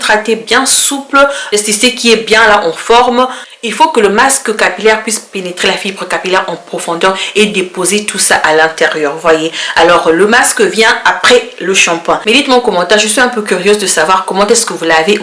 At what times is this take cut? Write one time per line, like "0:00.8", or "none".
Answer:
none